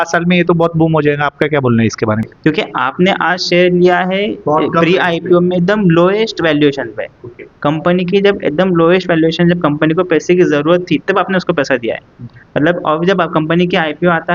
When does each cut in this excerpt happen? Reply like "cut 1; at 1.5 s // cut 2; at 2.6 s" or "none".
cut 1; at 2.3 s